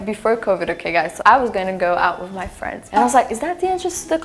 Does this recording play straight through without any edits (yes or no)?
yes